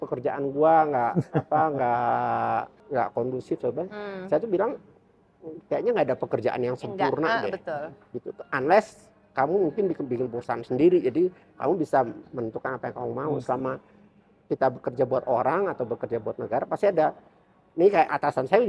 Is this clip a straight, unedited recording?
no; 1 cut; at 2.8 s

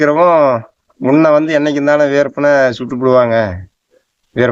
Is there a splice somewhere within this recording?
no; 0 cuts

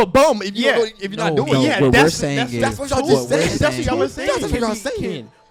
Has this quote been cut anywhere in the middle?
no; 0 cuts

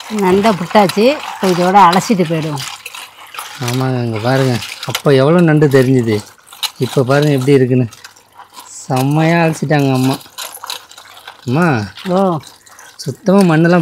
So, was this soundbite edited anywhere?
no; 0 cuts

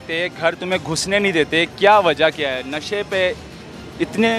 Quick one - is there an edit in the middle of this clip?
no; 0 cuts

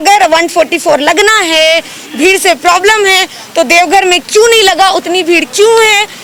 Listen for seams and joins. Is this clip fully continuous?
yes; 0 cuts

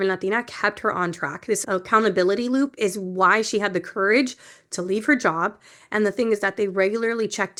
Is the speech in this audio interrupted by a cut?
no; 0 cuts

